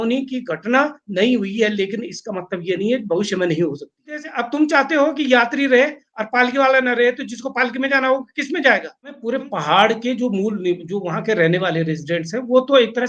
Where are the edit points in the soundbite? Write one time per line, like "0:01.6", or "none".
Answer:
0:04.3
0:09.2

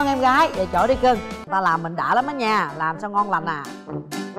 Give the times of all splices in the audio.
0:01.4

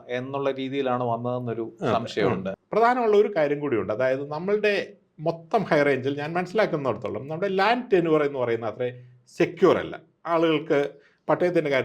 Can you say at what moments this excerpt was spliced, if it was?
0:02.5

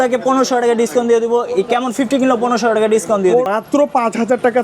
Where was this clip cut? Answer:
0:03.5

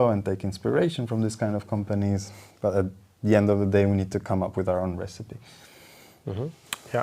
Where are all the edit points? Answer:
none

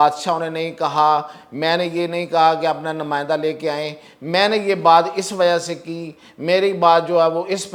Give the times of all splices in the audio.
none

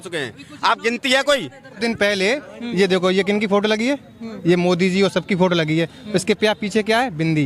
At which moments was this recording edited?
0:01.8

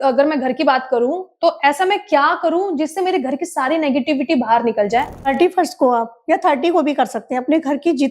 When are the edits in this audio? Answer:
0:05.3

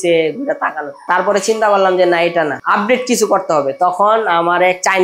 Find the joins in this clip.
0:01.0

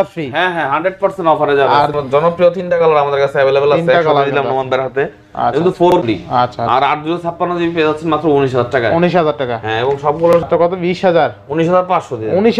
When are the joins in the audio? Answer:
0:01.9
0:06.0
0:10.4

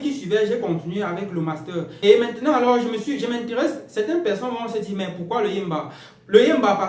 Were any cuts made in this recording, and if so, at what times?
0:01.9

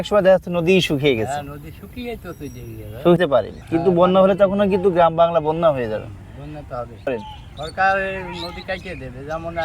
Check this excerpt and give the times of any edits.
0:03.2
0:07.2

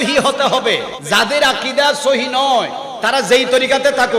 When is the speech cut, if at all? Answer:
0:00.9

